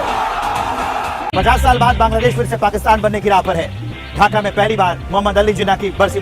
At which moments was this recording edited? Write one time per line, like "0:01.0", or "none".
0:01.2

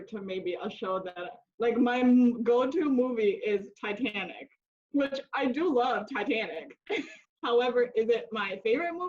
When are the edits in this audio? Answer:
0:07.1

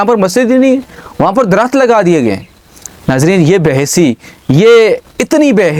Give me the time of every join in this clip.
none

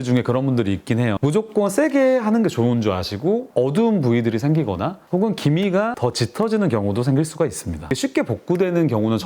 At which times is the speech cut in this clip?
0:03.5
0:07.9

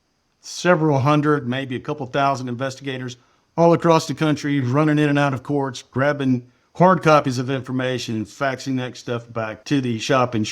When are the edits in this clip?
0:09.6

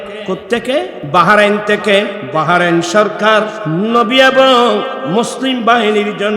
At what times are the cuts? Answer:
0:01.0
0:02.2
0:03.6
0:05.0

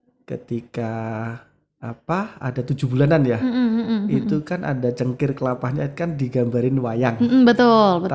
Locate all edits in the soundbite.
none

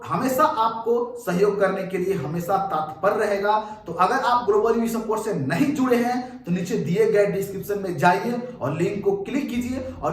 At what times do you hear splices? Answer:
none

